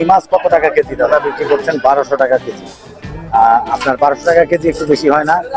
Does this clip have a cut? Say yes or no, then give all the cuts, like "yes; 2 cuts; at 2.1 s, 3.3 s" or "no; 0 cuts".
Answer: yes; 1 cut; at 1.1 s